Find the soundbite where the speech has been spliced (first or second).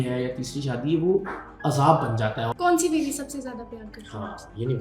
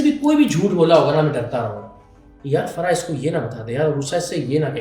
first